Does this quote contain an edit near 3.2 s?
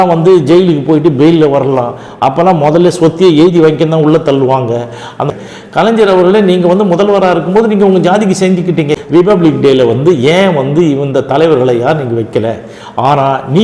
no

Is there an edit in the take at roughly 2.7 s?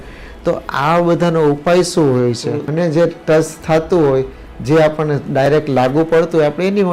yes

